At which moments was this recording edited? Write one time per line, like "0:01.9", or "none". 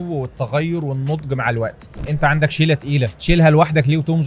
0:02.0
0:03.1